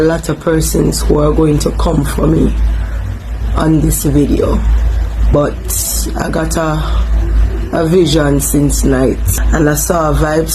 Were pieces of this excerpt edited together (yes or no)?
yes